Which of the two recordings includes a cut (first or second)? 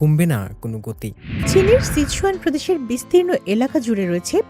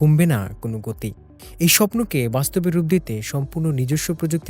first